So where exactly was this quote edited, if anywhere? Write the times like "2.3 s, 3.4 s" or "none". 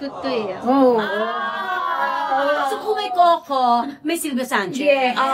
none